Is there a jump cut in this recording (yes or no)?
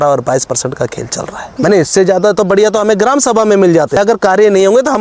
yes